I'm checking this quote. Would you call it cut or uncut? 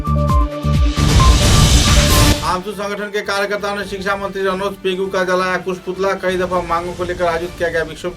cut